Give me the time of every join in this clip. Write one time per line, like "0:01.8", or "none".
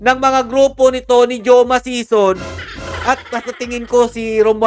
none